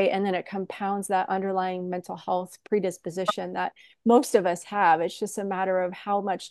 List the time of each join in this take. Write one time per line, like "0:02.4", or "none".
none